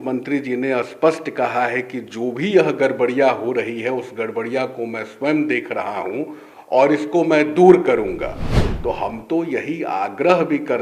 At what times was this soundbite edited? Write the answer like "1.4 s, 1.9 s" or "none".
none